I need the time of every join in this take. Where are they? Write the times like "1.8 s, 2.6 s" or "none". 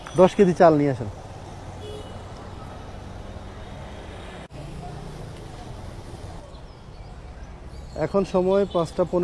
4.5 s, 6.4 s